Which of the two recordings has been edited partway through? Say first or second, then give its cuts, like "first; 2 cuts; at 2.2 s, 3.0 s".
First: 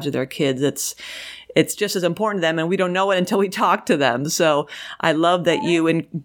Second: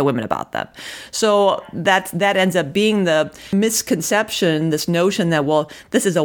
second; 1 cut; at 3.4 s